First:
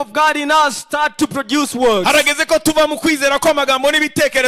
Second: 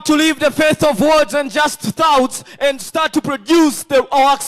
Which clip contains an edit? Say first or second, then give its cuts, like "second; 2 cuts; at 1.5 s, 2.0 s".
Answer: second; 1 cut; at 2.8 s